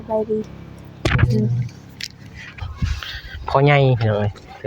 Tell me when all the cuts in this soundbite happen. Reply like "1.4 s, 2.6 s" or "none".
2.4 s